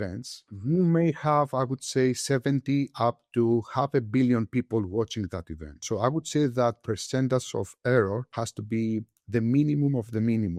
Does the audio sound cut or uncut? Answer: uncut